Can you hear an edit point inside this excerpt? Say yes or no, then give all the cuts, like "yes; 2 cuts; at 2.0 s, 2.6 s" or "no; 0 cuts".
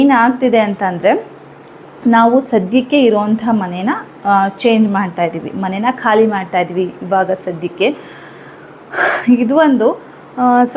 no; 0 cuts